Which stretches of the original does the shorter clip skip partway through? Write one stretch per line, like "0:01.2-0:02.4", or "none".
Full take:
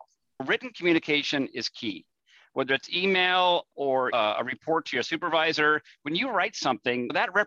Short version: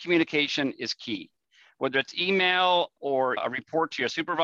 0:04.1-0:04.3